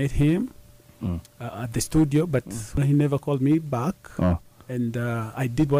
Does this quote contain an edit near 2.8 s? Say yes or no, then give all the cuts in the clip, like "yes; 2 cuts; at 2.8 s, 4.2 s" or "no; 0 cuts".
yes; 1 cut; at 2.8 s